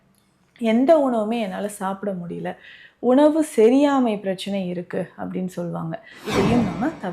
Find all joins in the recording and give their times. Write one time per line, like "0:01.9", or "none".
0:06.2